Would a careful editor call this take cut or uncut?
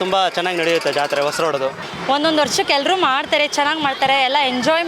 cut